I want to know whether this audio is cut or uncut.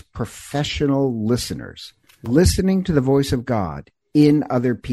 cut